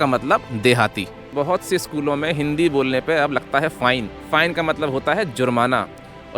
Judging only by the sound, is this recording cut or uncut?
cut